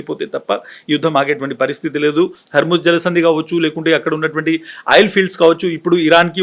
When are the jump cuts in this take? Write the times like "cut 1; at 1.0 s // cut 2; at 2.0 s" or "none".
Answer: cut 1; at 2.4 s